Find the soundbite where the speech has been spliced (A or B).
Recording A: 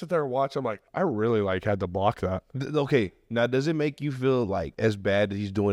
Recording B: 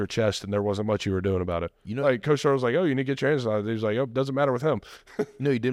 A